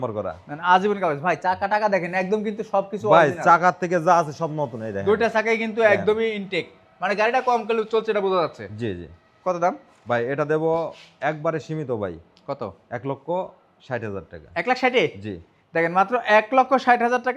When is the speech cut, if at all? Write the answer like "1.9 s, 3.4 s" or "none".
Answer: none